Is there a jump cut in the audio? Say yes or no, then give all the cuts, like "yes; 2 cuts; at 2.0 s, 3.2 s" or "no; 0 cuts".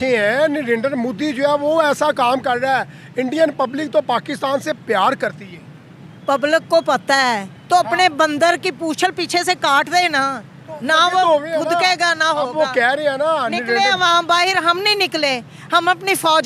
no; 0 cuts